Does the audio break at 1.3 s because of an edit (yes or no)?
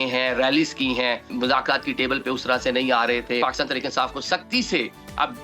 yes